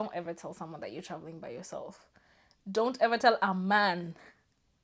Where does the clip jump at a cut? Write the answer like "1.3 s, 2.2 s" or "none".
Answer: none